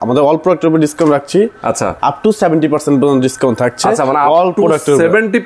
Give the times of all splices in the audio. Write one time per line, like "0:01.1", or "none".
none